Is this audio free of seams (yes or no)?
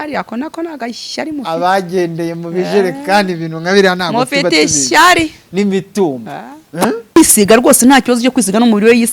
no